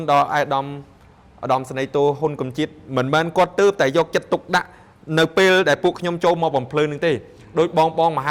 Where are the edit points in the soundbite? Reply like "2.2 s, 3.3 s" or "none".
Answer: none